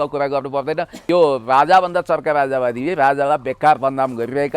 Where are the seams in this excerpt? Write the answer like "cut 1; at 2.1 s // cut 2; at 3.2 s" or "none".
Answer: cut 1; at 1.0 s